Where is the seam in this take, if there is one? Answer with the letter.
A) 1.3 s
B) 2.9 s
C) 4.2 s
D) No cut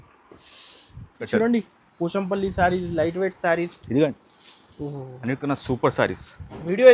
A